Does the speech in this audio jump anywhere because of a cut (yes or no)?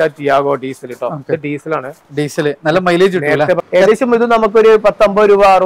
yes